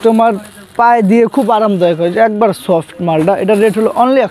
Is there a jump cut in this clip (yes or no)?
no